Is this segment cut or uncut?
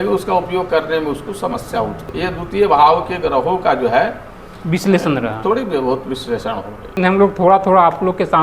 cut